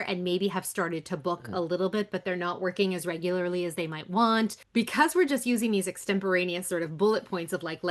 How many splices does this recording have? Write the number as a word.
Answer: one